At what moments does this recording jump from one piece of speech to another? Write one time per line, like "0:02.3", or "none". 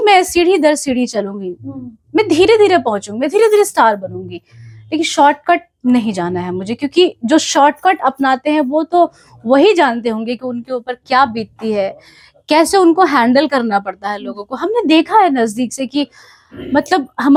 none